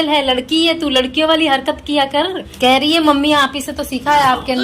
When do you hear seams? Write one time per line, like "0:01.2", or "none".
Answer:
0:02.5